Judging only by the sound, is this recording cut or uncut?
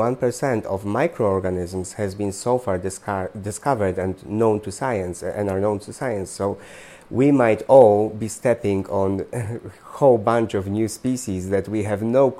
uncut